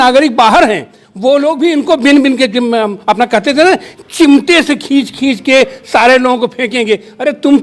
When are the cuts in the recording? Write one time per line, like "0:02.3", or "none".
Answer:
none